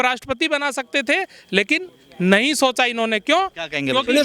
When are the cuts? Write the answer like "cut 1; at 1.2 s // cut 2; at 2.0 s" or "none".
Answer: none